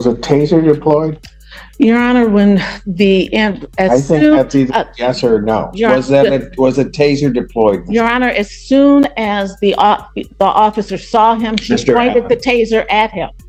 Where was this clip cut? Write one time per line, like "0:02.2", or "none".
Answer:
none